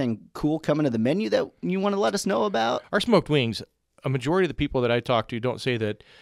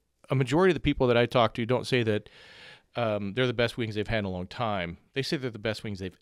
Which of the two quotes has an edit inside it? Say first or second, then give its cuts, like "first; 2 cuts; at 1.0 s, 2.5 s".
first; 1 cut; at 2.8 s